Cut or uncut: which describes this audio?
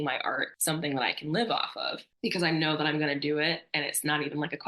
uncut